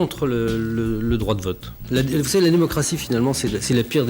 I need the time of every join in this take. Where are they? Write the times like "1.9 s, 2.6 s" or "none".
1.8 s